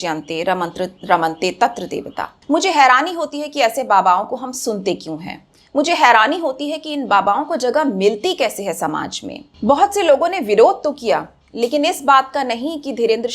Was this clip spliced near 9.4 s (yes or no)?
yes